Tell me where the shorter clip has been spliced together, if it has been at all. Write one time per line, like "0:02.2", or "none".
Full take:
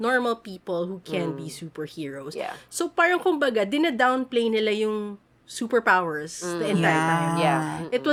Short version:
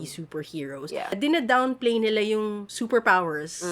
0:01.2
0:02.7